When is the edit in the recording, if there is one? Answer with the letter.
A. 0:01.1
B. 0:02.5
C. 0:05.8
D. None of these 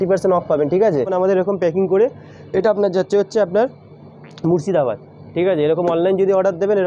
A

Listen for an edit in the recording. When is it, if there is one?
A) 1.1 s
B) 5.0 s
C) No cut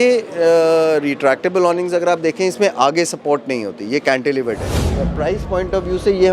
B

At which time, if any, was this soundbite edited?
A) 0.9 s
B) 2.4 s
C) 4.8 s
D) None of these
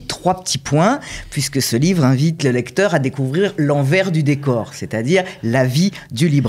B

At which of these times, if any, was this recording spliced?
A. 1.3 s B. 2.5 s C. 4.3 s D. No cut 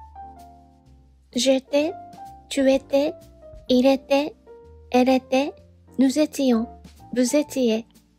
A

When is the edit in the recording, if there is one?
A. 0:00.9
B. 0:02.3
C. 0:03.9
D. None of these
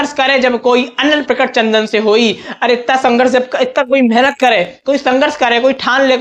D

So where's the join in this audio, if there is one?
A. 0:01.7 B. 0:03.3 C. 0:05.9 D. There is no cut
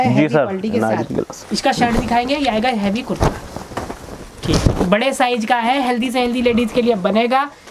D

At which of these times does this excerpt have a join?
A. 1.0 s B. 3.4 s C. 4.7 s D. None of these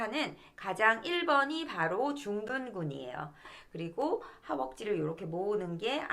B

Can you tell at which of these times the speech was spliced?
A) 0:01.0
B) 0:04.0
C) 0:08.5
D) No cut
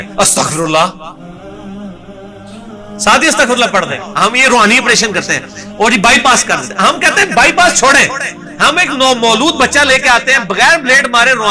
B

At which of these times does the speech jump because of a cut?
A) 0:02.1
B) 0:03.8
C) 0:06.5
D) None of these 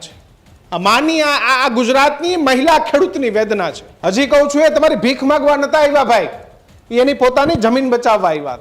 B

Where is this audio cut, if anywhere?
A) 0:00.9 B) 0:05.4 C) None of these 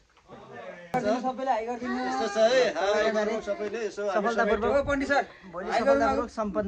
A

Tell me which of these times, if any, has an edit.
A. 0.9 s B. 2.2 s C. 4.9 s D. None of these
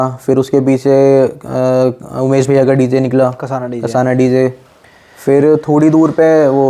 D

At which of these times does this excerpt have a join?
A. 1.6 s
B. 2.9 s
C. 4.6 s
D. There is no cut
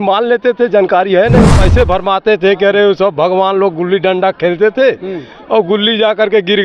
A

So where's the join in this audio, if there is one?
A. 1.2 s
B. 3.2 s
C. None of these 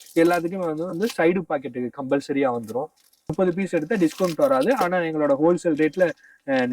B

